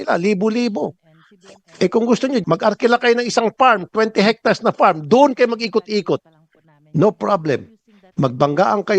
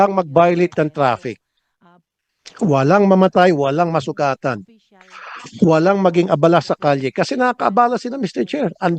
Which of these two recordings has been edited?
first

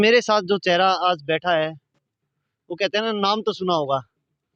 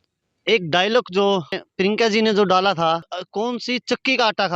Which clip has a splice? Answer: second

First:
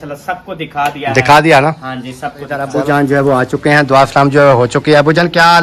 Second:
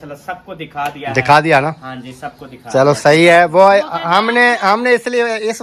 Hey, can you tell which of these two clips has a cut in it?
first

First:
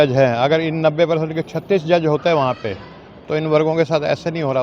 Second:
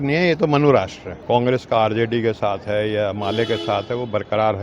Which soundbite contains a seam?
second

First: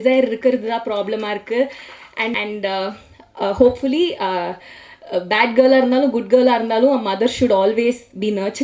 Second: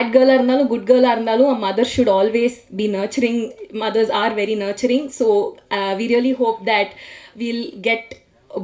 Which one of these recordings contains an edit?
first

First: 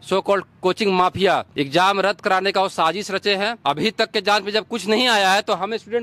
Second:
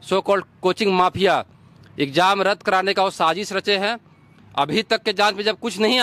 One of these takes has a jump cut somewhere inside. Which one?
first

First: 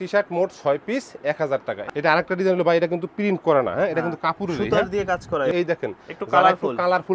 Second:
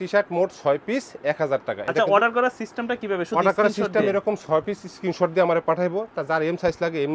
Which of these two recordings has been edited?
first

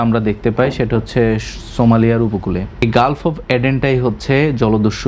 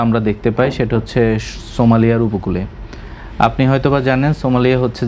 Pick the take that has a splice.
first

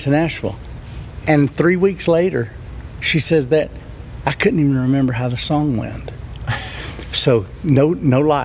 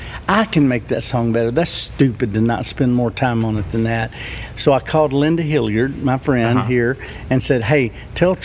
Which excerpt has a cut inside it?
first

